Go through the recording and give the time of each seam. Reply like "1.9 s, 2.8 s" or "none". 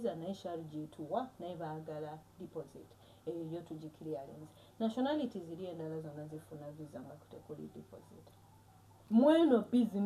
8.9 s